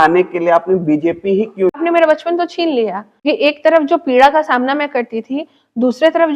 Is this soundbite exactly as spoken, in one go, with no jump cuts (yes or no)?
no